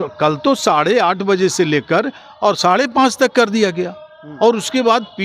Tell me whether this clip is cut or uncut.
uncut